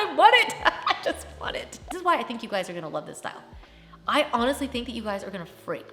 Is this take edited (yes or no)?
yes